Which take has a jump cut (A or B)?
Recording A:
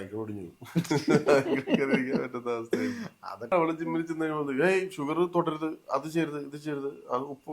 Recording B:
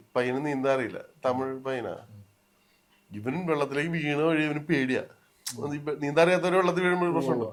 A